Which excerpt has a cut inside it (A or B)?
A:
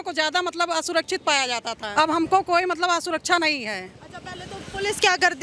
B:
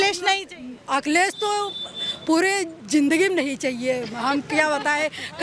A